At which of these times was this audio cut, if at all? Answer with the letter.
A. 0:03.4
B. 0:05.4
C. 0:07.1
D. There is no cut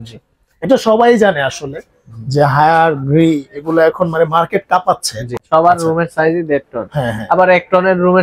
B